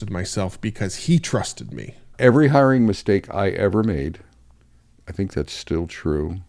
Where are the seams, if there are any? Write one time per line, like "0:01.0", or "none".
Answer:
0:02.1